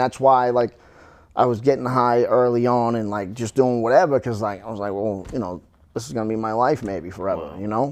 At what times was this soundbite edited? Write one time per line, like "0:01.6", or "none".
none